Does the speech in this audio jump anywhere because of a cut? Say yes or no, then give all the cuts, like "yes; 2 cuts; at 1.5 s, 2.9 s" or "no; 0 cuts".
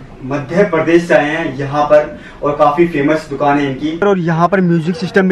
yes; 1 cut; at 4.0 s